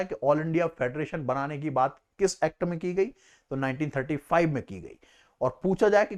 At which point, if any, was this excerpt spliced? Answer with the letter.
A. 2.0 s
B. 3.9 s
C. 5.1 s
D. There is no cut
D